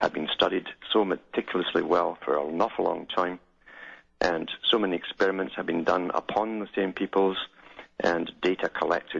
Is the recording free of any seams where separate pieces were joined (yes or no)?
yes